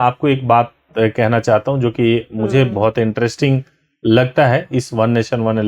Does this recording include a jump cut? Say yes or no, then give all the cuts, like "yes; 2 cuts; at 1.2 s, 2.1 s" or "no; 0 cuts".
no; 0 cuts